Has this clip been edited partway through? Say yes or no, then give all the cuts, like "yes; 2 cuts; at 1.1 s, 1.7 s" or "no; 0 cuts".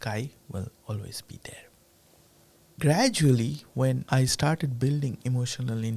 yes; 1 cut; at 2.7 s